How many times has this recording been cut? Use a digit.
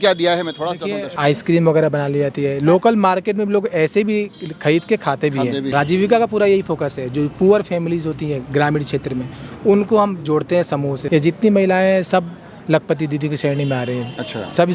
3